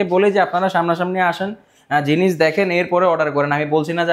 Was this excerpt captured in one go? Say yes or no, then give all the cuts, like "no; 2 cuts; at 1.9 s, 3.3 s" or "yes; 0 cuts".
yes; 0 cuts